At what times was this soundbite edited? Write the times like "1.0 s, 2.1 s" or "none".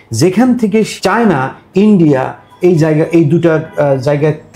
0.9 s